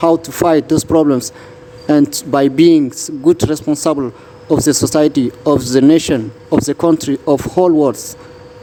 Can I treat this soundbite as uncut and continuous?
yes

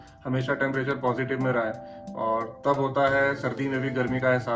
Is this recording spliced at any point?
yes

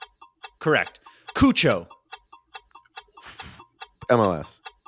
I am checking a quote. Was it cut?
no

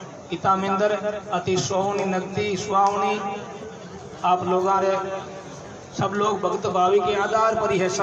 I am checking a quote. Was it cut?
no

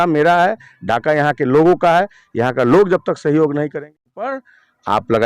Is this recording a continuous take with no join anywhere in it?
no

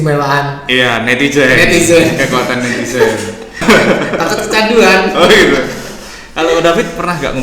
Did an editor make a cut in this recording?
yes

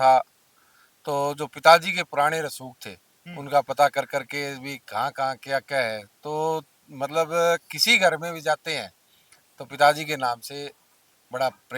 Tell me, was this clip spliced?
no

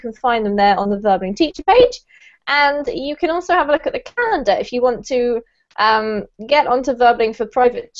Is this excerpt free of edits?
yes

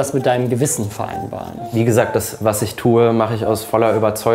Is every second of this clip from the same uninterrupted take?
no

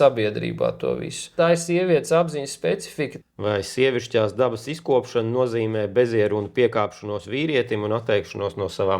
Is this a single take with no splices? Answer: no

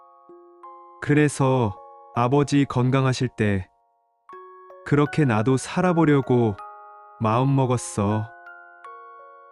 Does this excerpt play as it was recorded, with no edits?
no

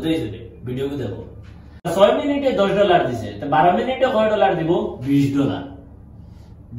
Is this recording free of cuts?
no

